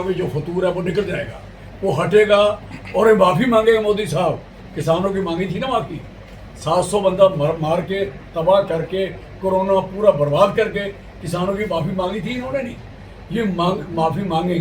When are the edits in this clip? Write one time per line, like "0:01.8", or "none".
none